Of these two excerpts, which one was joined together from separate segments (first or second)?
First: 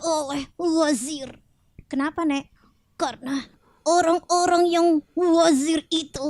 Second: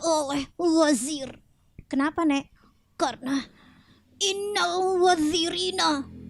first